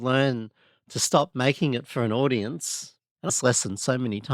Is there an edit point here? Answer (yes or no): yes